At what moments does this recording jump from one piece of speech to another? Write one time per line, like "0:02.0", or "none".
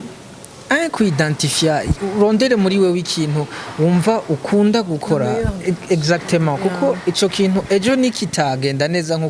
none